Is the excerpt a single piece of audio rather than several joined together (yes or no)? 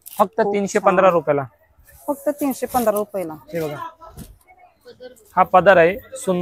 yes